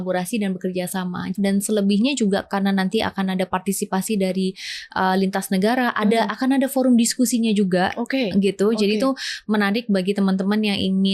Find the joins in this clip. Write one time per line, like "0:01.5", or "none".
0:01.3

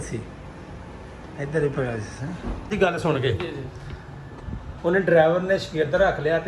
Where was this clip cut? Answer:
0:02.7

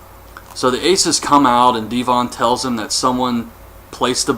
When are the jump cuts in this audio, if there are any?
0:01.4

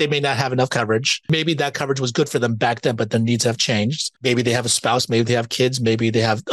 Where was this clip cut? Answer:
0:01.3
0:04.1

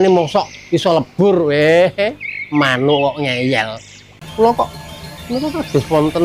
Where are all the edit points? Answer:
0:04.2

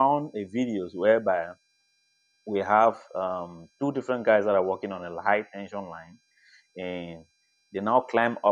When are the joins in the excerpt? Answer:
0:00.9

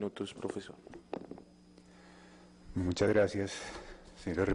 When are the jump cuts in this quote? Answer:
0:02.3

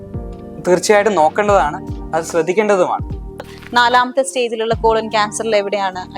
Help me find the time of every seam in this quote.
0:03.5

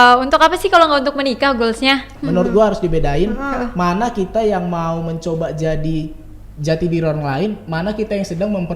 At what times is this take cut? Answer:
0:02.1

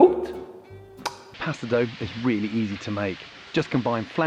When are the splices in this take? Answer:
0:01.4

